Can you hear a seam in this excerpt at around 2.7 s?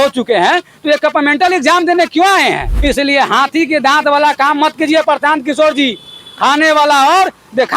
yes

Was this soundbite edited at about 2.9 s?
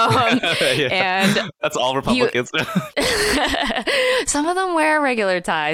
yes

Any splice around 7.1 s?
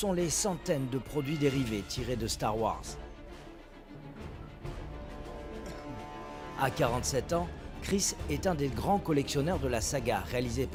no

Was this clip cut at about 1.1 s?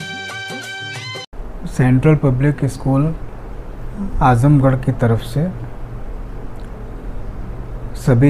yes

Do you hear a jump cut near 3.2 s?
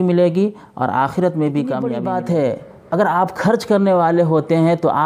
no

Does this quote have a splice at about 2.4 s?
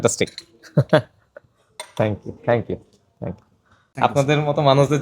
no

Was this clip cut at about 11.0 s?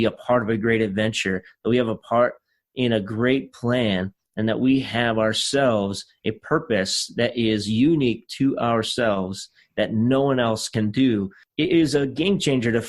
yes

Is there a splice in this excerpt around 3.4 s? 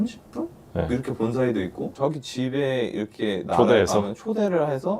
no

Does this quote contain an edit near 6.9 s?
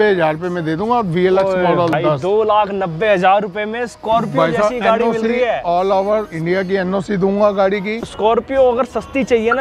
no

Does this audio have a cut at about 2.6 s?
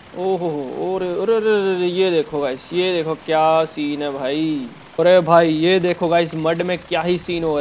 no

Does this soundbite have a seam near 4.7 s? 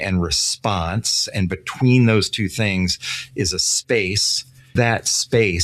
yes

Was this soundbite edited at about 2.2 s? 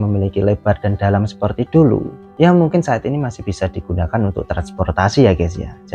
yes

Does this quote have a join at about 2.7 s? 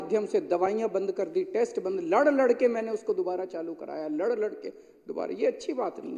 no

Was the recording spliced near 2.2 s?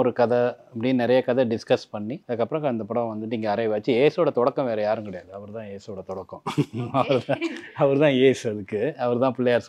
yes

